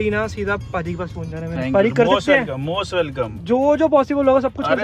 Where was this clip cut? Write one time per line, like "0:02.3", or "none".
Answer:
none